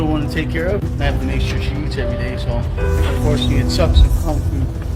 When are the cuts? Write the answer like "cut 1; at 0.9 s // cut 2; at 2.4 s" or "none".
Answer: none